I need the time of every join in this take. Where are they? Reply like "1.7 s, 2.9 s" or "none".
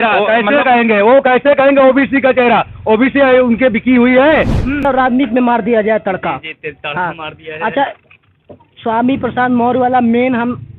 4.9 s